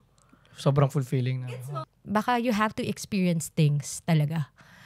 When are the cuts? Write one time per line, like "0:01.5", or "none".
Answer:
0:01.4